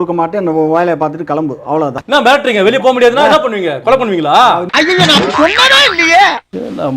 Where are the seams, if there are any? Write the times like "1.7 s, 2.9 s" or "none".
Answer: 2.0 s